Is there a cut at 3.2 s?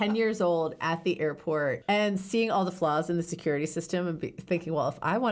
no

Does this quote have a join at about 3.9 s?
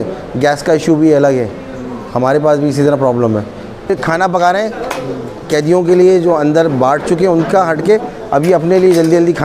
yes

